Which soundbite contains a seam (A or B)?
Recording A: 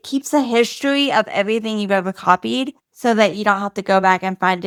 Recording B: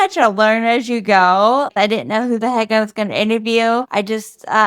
B